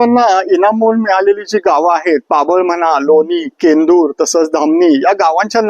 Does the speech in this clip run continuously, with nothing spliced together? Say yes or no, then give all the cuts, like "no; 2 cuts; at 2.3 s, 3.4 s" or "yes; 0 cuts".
yes; 0 cuts